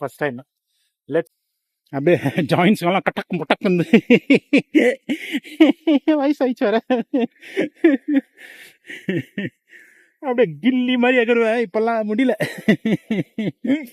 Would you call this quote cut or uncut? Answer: cut